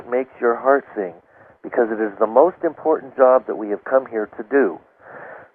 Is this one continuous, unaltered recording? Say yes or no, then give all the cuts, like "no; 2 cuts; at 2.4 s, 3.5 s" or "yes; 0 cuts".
yes; 0 cuts